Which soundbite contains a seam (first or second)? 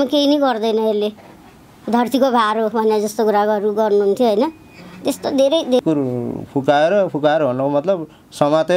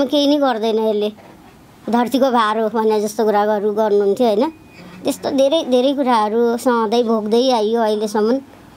first